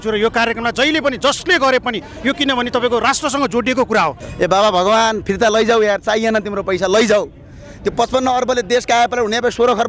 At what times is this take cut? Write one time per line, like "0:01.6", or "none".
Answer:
0:04.2